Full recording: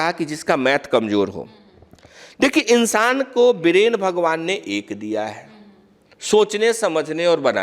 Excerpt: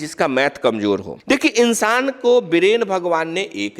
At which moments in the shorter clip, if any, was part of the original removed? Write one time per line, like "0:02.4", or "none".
0:01.1